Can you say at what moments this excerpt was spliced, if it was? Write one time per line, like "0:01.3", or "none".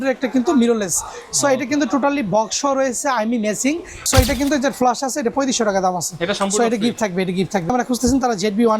0:04.0
0:07.7